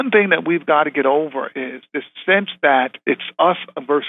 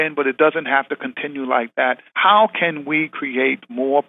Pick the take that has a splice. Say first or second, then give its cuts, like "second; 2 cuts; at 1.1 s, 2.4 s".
second; 1 cut; at 2.1 s